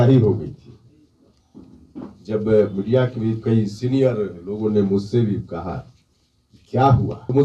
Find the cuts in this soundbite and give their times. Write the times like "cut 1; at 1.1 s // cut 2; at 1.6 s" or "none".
none